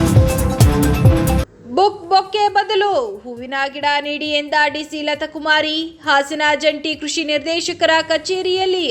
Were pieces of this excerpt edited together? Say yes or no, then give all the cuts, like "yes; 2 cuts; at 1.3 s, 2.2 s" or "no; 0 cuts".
yes; 1 cut; at 1.4 s